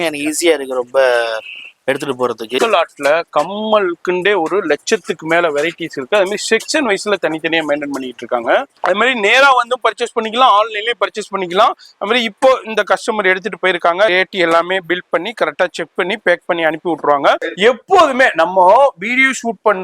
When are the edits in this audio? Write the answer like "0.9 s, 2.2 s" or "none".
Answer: 2.6 s, 8.7 s, 14.1 s, 17.5 s